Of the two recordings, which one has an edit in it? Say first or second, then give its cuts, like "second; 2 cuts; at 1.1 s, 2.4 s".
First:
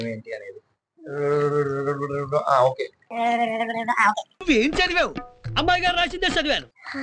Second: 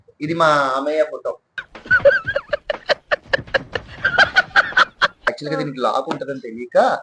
second; 1 cut; at 5.3 s